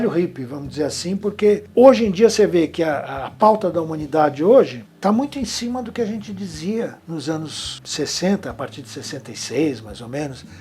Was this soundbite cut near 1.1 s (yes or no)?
no